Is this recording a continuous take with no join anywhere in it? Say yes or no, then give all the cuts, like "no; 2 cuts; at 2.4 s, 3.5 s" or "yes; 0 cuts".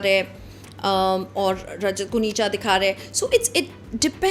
yes; 0 cuts